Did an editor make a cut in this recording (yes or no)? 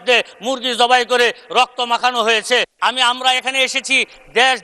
no